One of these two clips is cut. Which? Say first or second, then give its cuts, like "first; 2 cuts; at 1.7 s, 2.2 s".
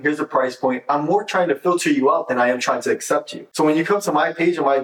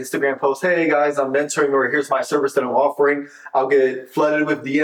first; 1 cut; at 3.4 s